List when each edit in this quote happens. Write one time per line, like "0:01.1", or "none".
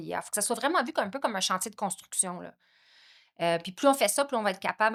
none